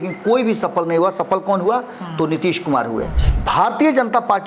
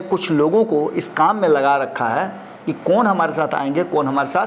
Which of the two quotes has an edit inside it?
first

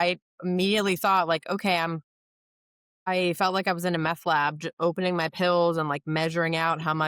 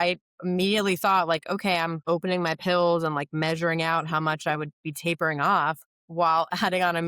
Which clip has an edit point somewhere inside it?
second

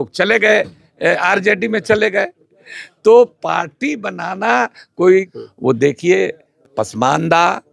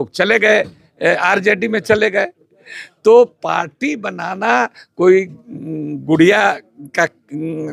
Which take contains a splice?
first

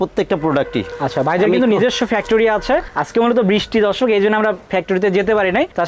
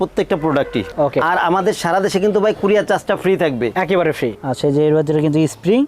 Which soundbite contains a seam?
second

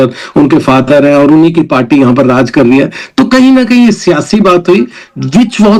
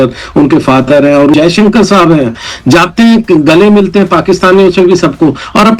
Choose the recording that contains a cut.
second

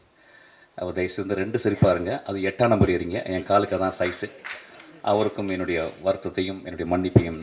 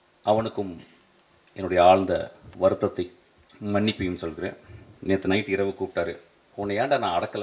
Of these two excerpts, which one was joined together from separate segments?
second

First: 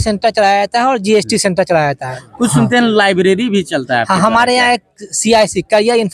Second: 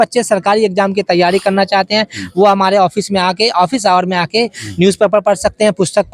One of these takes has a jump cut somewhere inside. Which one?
first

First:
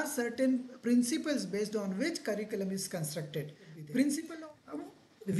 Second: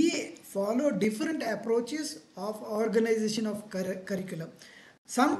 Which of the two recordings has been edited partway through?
first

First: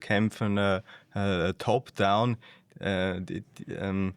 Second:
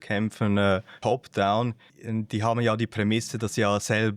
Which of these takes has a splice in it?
second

